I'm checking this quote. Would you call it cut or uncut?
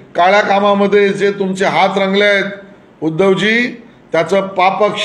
uncut